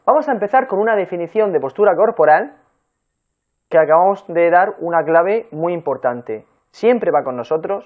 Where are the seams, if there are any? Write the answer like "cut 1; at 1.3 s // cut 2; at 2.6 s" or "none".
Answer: cut 1; at 5.2 s

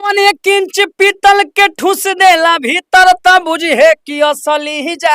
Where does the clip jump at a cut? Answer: none

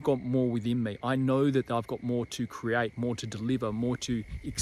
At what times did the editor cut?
none

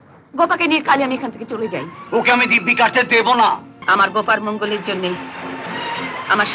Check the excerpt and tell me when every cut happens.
cut 1; at 3.7 s

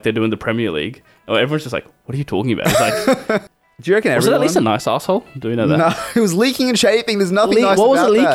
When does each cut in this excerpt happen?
cut 1; at 3.5 s

